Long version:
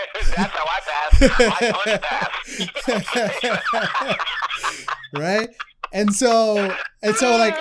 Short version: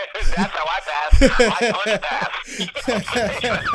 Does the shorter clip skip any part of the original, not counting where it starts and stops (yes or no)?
no